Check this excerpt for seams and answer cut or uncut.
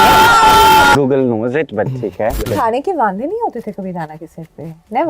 cut